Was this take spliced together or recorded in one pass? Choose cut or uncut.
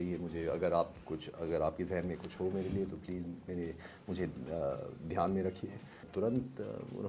cut